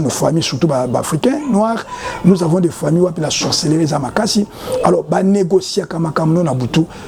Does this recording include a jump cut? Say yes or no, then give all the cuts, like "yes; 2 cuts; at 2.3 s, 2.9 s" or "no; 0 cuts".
no; 0 cuts